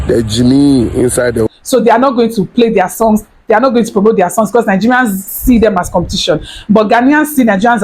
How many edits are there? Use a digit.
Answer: 1